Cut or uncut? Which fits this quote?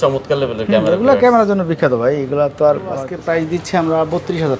cut